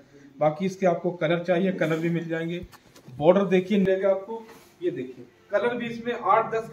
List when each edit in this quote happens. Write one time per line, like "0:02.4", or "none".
0:03.9